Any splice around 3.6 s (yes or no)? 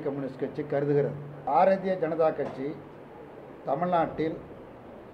no